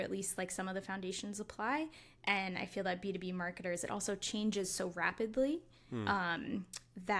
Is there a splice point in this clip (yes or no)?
no